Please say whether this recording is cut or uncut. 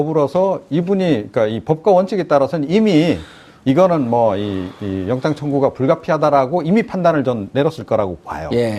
uncut